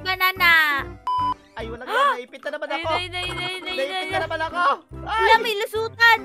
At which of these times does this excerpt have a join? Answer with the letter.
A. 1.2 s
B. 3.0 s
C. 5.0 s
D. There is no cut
A